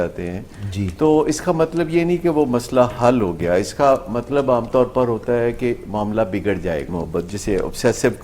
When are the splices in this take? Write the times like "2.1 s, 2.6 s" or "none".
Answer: 6.9 s